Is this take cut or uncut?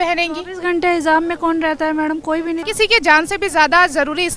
cut